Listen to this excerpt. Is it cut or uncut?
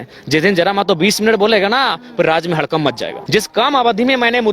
cut